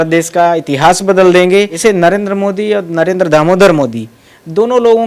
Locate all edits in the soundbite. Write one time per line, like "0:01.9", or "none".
0:01.7